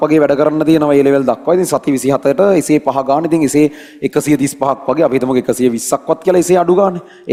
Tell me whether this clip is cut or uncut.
uncut